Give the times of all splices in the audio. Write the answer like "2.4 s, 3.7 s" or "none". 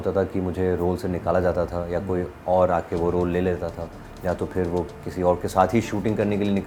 none